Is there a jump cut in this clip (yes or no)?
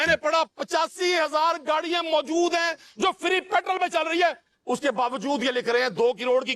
no